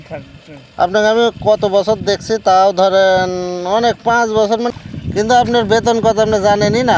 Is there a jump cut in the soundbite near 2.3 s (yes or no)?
no